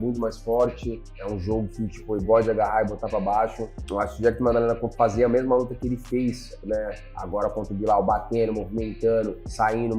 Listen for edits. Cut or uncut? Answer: uncut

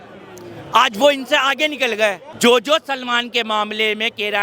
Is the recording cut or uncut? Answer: cut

